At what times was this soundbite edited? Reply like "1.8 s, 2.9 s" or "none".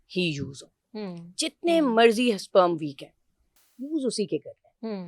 none